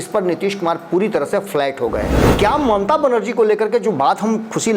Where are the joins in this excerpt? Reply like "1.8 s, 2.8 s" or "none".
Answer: 2.2 s